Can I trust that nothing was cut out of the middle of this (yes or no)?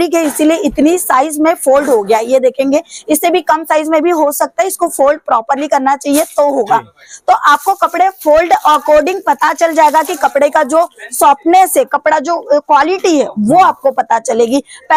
yes